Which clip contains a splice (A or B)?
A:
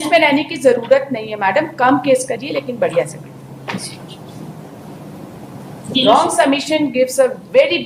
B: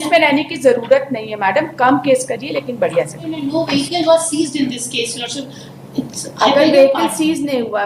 B